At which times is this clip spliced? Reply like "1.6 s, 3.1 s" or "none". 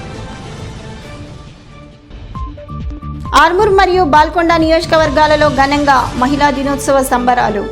3.1 s